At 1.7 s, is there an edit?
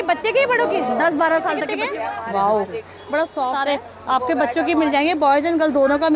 yes; 2 cuts; at 1.7 s, 3.6 s

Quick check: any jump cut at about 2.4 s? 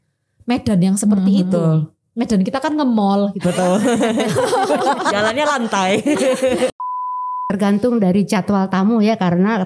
no; 1 cut; at 7.0 s

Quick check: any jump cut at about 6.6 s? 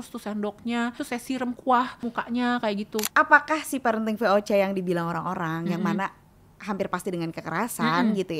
no; 3 cuts; at 1.0 s, 2.0 s, 3.1 s

